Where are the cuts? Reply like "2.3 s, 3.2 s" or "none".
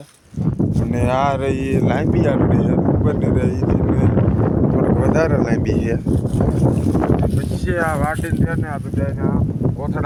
none